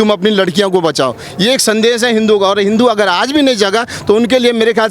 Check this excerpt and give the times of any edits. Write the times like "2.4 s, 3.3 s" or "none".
1.2 s